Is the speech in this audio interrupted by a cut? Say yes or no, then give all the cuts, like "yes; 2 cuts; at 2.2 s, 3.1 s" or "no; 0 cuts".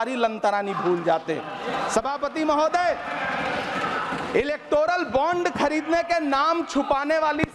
no; 0 cuts